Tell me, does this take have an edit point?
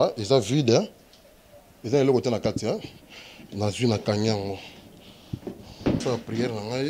yes; 1 cut; at 6.0 s

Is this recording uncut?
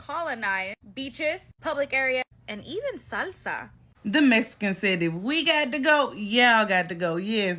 no; 1 cut; at 3.8 s

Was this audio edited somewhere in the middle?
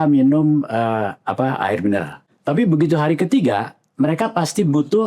yes; 1 cut; at 2.3 s

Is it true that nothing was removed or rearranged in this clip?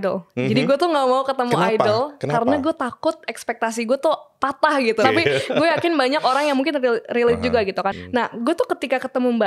no; 2 cuts; at 5.0 s, 7.9 s

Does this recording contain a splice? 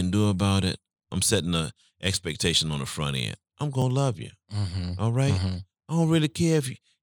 yes; 1 cut; at 1.1 s

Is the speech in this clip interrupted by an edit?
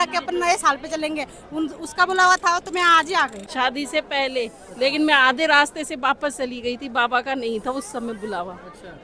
yes; 1 cut; at 3.4 s

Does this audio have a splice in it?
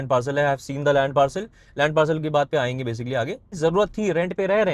yes; 1 cut; at 3.5 s

